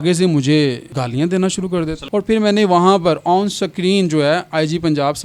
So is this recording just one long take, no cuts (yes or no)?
no